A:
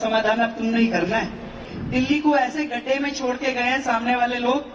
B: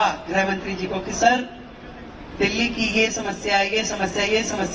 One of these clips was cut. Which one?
A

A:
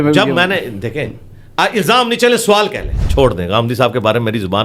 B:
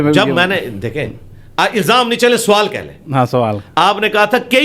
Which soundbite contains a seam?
A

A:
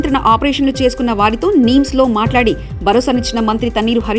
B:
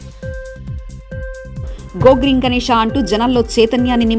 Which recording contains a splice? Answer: B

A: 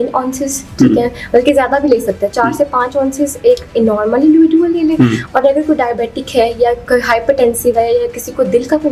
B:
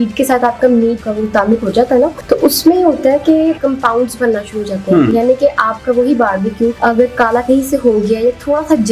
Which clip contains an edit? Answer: B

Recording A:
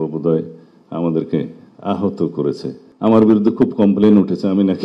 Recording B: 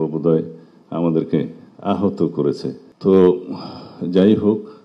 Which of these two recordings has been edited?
A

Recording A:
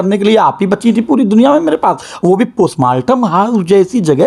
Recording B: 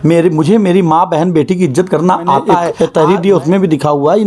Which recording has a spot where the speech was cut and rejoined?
B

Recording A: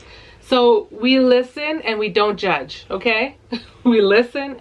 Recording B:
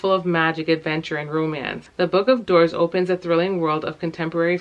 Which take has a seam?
B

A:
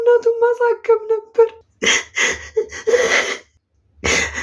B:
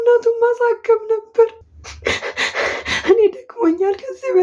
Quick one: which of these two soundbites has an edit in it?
B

